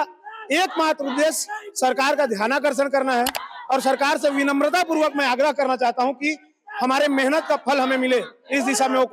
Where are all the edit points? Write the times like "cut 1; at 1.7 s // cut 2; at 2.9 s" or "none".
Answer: none

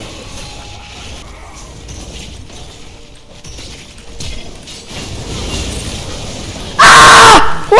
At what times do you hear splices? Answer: cut 1; at 1.2 s // cut 2; at 6.6 s

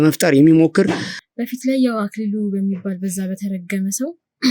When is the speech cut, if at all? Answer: cut 1; at 1.1 s

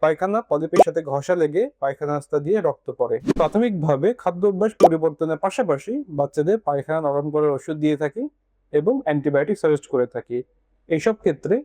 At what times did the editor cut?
cut 1; at 3.3 s

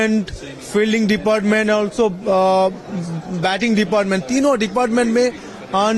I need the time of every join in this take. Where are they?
none

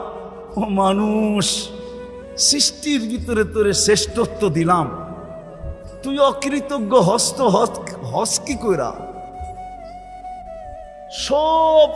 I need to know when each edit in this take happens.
none

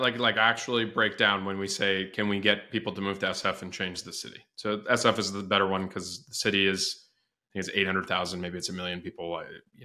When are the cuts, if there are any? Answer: none

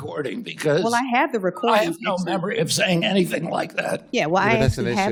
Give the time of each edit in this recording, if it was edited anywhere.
none

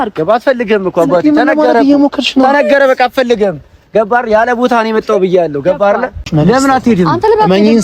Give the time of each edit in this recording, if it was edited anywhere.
cut 1; at 6.2 s

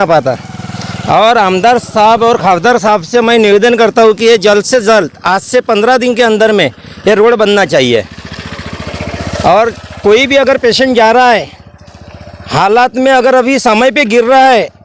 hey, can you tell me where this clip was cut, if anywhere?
none

